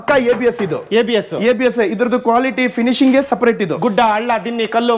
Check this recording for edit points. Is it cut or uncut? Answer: uncut